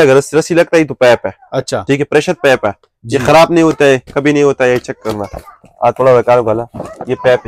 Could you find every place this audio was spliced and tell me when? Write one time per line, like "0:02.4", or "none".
none